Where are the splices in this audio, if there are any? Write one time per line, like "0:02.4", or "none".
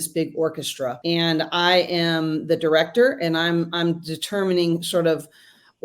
0:01.0